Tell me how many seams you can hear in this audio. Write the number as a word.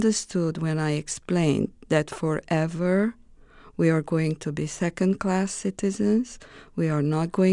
zero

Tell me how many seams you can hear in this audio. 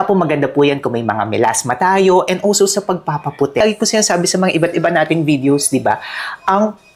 one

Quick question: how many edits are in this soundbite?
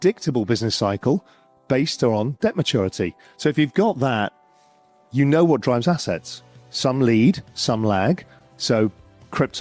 zero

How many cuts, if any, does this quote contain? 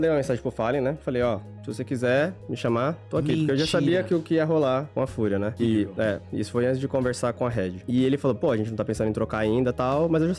zero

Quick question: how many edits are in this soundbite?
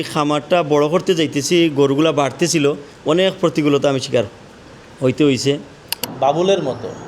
two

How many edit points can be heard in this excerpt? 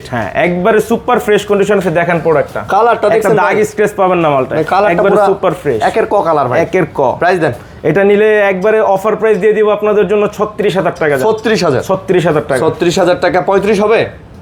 zero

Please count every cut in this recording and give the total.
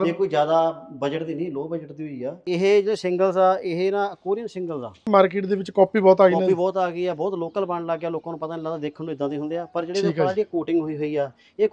two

